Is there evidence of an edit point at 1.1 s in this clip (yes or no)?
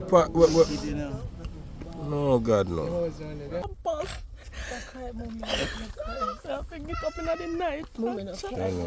no